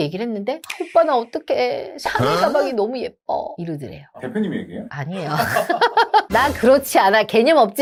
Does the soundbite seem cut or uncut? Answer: uncut